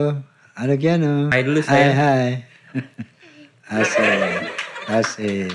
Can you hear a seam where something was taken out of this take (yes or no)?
yes